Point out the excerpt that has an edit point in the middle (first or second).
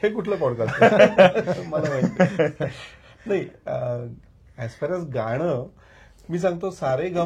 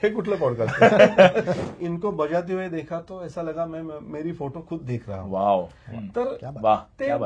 second